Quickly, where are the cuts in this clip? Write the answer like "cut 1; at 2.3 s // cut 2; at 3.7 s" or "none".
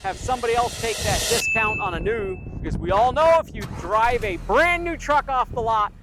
cut 1; at 2.5 s